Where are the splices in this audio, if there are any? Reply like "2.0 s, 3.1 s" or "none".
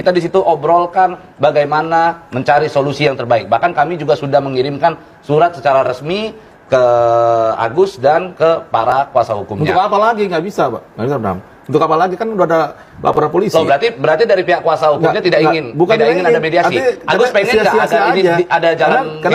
none